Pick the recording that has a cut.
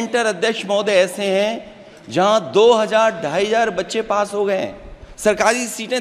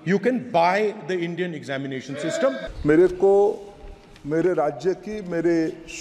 second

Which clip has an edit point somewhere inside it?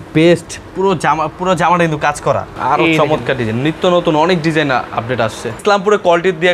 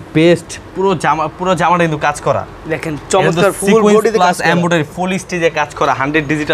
first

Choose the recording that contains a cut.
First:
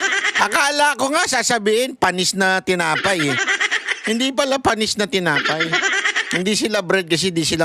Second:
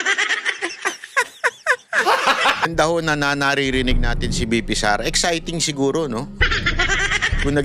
second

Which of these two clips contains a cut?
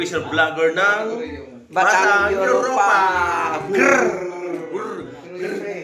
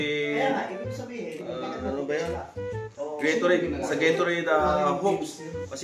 second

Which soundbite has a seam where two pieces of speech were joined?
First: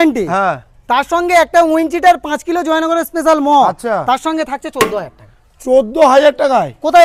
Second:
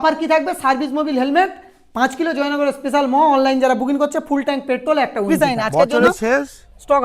second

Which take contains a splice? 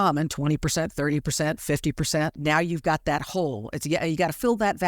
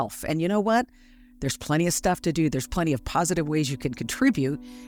first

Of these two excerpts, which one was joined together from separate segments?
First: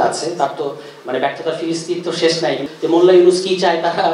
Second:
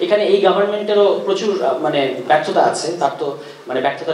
first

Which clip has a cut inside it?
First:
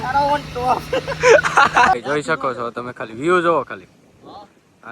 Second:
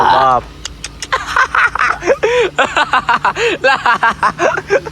first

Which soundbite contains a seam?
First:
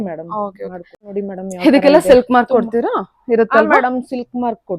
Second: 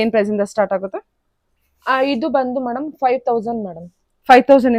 first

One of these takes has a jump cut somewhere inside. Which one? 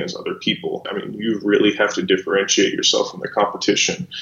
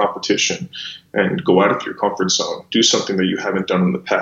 first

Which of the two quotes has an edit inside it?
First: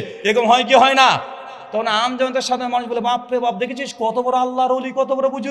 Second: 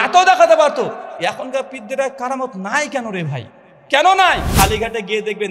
second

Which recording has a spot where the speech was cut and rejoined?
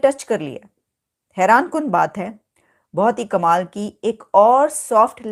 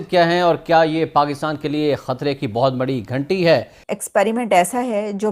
second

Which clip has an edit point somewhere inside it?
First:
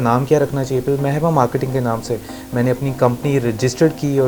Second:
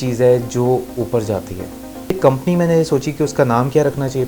second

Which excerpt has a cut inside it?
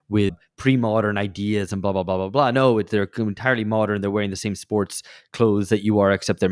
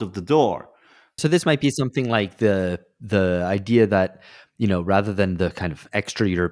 second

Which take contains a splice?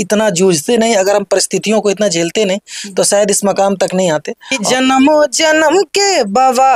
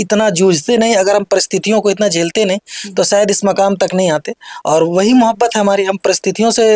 first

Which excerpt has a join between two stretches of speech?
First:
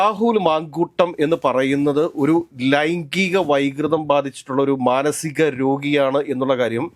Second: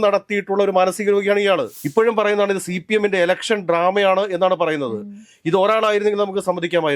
second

